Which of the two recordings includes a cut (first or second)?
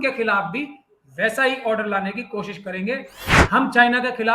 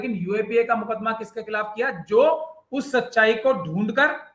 first